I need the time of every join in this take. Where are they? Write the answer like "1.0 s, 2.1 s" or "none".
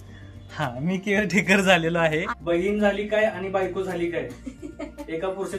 2.3 s